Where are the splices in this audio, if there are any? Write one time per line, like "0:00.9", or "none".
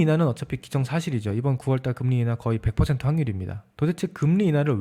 0:03.6